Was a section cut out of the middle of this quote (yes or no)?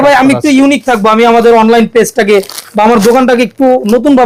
no